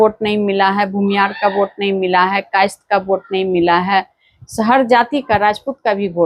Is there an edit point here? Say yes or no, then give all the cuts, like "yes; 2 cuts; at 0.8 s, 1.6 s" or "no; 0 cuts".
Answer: no; 0 cuts